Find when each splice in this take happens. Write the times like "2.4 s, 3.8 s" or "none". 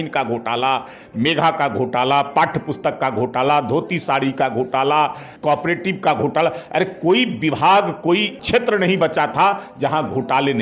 5.3 s, 8.4 s